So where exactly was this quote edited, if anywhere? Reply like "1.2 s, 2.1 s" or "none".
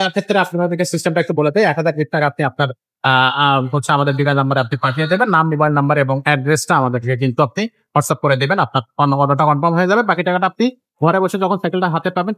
none